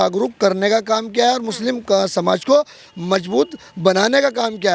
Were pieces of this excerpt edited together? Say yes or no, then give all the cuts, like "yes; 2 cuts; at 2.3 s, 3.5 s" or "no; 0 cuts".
no; 0 cuts